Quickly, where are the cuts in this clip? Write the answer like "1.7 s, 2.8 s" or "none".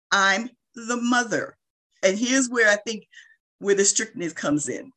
2.0 s